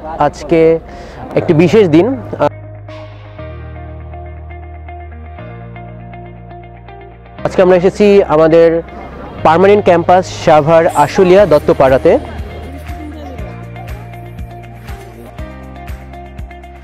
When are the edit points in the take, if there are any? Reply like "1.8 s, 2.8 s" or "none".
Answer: none